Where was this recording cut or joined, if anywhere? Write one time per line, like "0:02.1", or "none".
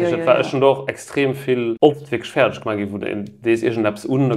0:01.8